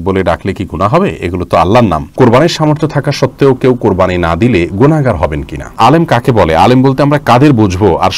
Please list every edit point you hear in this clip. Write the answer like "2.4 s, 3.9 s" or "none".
2.1 s, 5.7 s

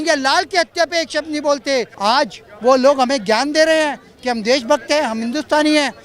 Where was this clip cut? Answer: 1.9 s

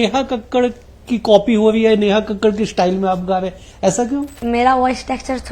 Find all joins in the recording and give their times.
4.4 s

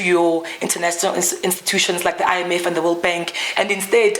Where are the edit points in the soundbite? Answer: none

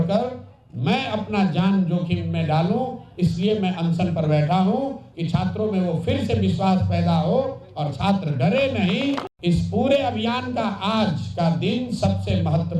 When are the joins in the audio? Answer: 9.3 s

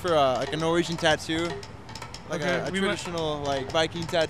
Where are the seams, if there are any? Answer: none

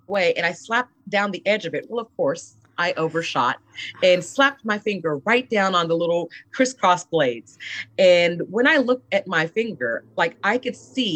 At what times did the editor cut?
none

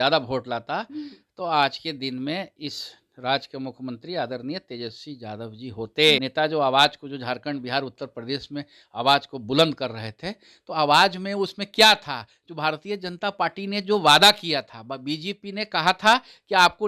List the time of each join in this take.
6.2 s

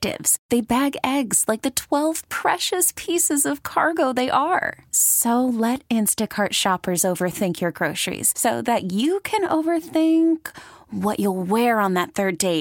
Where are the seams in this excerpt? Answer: none

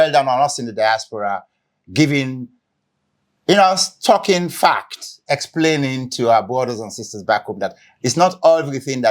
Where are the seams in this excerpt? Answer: none

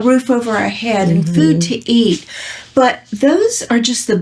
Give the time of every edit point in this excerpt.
none

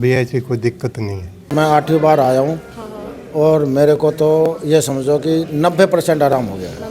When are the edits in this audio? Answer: 1.5 s

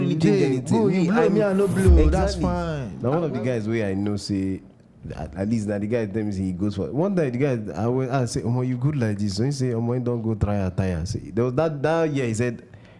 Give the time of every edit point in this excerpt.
2.8 s

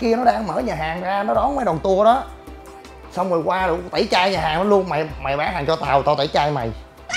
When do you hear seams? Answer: none

